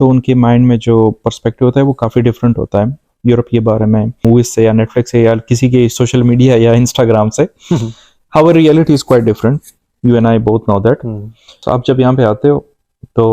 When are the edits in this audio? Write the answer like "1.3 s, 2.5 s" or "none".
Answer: 4.2 s, 11.6 s